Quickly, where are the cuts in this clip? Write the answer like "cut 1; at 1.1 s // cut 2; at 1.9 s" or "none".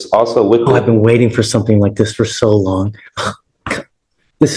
none